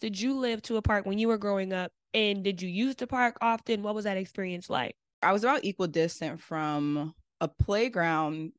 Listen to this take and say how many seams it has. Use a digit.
1